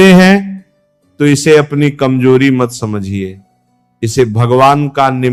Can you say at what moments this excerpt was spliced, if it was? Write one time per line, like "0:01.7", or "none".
none